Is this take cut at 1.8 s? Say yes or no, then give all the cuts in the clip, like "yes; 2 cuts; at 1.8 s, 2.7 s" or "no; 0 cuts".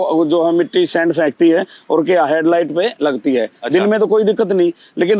no; 0 cuts